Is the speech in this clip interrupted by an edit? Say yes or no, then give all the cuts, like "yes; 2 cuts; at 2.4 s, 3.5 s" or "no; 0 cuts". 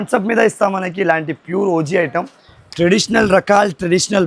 no; 0 cuts